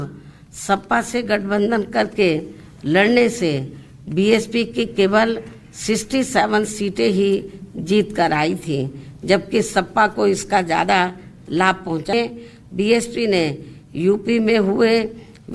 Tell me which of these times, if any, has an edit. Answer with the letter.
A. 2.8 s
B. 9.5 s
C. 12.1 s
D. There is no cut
C